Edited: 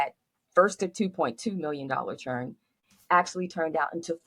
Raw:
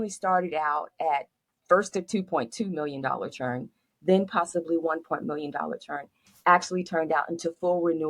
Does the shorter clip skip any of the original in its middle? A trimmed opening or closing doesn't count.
yes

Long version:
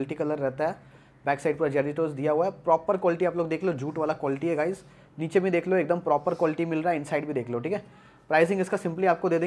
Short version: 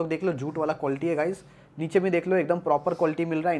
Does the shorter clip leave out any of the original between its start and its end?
no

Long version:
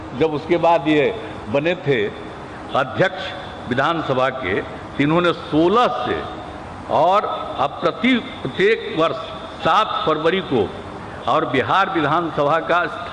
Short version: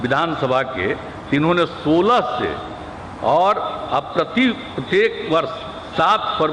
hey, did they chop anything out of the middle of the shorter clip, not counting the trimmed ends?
no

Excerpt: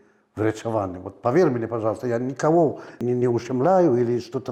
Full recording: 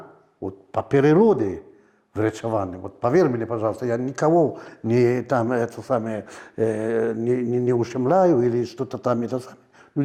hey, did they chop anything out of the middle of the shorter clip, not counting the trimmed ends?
yes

